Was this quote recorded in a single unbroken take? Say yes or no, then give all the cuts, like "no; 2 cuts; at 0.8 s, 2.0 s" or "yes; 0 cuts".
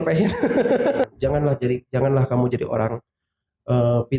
no; 1 cut; at 1.0 s